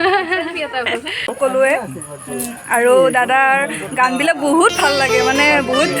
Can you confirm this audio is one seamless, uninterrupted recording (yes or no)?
no